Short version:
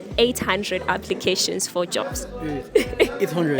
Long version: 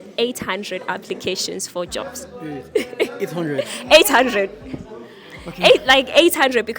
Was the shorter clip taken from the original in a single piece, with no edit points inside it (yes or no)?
yes